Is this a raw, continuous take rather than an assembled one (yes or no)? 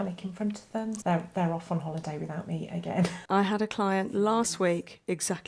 no